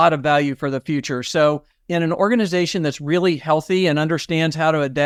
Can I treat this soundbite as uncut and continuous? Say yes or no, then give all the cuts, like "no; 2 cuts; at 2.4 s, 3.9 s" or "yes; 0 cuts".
yes; 0 cuts